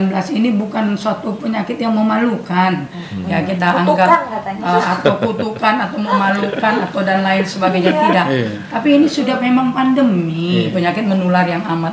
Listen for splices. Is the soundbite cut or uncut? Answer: uncut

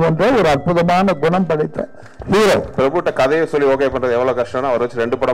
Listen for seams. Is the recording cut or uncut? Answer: cut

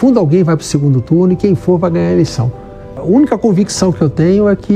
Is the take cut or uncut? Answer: cut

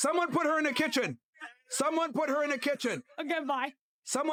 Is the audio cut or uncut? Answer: uncut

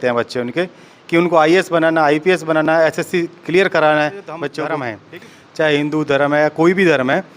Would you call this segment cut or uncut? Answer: cut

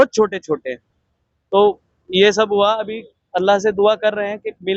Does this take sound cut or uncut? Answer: uncut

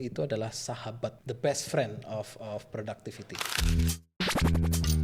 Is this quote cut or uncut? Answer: cut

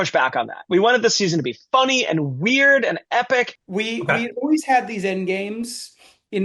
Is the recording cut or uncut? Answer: cut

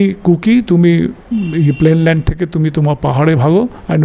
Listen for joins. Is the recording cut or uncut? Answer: uncut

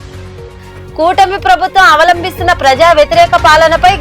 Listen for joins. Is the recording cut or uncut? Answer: cut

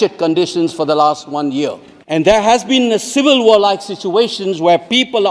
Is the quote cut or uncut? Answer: cut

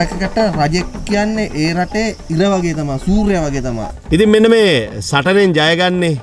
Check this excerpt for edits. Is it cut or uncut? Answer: cut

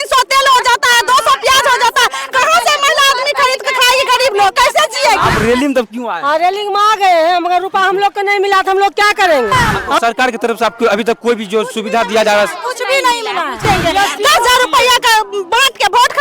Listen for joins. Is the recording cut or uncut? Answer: cut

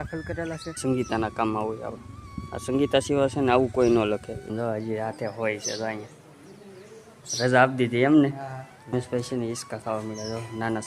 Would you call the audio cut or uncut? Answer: cut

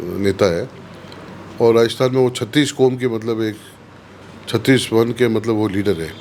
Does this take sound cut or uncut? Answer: uncut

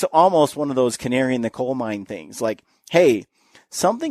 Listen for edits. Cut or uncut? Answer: uncut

